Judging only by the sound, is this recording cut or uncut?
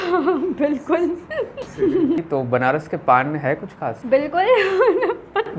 cut